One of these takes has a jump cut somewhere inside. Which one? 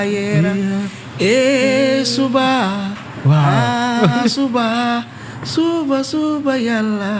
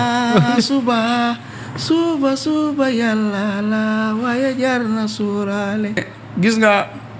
second; 1 cut; at 6.0 s

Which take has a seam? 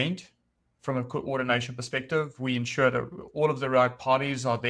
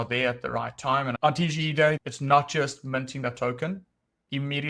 second; 2 cuts; at 1.2 s, 2.0 s

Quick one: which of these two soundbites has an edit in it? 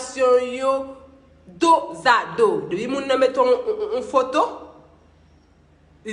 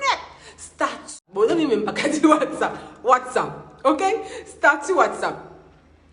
second; 1 cut; at 1.2 s

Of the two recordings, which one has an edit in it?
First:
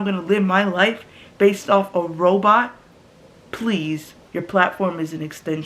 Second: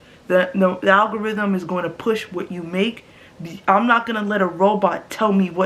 first; 1 cut; at 4.2 s

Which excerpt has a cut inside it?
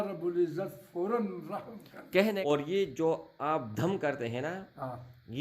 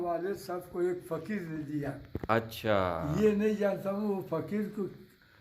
first; 1 cut; at 2.2 s

